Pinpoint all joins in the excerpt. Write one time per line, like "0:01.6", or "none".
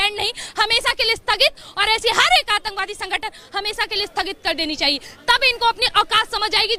none